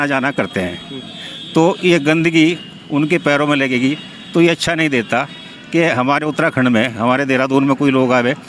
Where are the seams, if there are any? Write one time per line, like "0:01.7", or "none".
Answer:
none